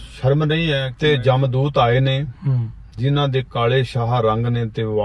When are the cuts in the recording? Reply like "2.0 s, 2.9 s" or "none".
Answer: 0.9 s